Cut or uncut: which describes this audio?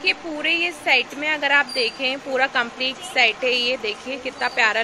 uncut